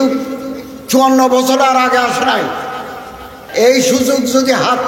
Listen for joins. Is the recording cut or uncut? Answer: cut